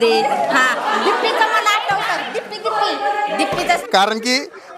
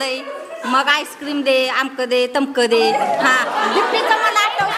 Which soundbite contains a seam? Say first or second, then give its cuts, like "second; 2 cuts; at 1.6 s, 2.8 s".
first; 1 cut; at 3.8 s